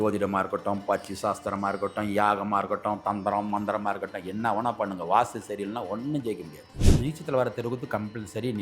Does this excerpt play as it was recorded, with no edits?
no; 1 cut; at 7.0 s

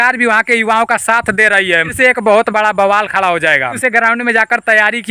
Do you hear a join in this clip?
yes; 2 cuts; at 1.9 s, 3.8 s

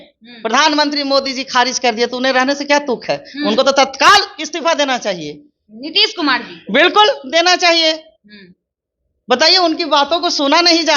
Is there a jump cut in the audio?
no; 0 cuts

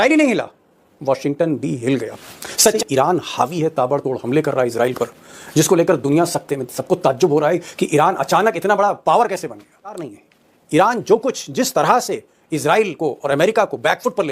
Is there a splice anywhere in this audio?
yes; 2 cuts; at 2.8 s, 10.1 s

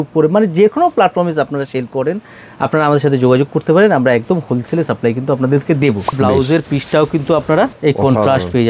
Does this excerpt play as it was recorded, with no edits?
no; 2 cuts; at 6.2 s, 7.8 s

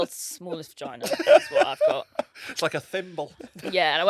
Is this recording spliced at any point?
no; 0 cuts

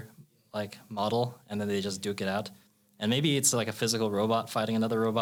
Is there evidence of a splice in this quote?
no; 0 cuts

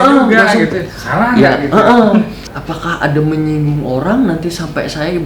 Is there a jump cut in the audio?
yes; 1 cut; at 2.4 s

